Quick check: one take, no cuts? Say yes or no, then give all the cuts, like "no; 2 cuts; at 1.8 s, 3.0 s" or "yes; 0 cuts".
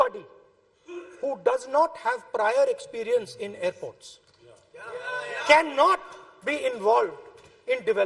yes; 0 cuts